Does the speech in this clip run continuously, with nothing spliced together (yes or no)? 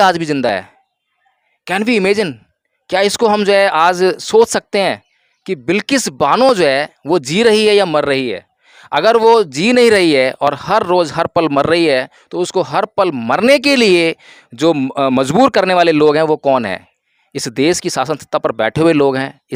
yes